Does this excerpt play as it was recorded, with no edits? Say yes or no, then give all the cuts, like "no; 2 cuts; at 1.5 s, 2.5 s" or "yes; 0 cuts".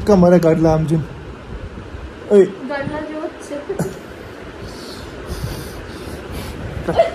yes; 0 cuts